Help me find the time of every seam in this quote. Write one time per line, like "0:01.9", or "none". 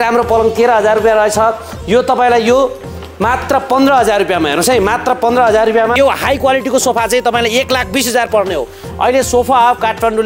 0:05.9